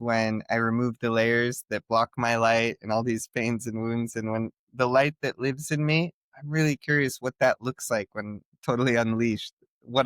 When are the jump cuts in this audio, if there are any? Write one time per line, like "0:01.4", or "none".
none